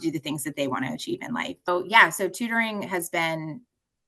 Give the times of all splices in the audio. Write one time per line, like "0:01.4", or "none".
0:01.7